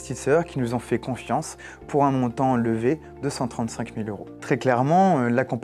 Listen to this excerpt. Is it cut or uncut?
cut